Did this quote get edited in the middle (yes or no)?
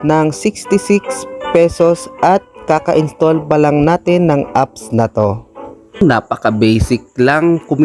yes